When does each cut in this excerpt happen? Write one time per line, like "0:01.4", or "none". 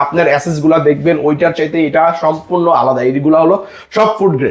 none